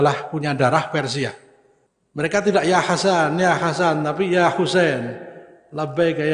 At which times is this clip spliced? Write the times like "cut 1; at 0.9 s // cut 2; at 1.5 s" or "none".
cut 1; at 1.5 s